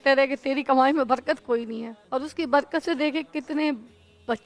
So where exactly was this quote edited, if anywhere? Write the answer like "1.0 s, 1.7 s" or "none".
1.9 s

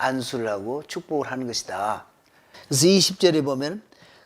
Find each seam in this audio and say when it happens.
none

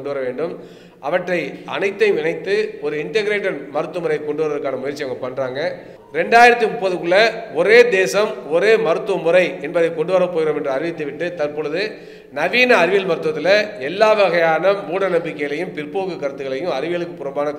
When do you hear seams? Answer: 5.9 s

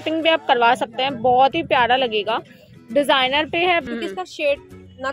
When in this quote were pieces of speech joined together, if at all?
3.8 s

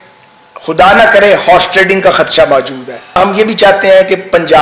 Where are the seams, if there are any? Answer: 3.2 s

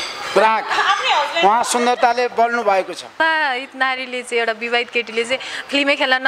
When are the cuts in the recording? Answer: 3.2 s

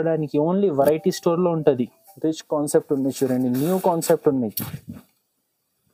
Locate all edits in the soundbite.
2.1 s

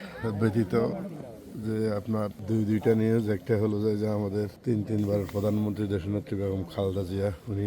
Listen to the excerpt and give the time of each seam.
2.4 s, 4.6 s

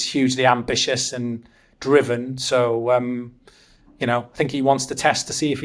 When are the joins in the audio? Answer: none

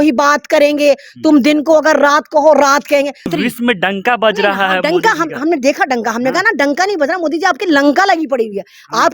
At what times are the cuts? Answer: 3.3 s

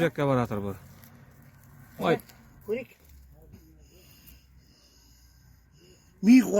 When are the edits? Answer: 3.7 s

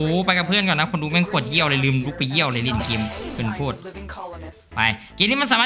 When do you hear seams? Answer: none

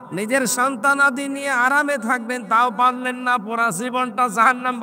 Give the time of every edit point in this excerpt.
none

